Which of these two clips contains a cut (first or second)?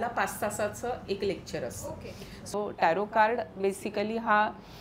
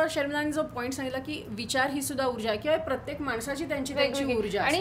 first